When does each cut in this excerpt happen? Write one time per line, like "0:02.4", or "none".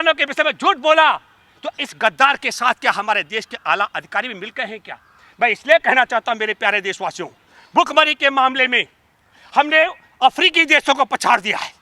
none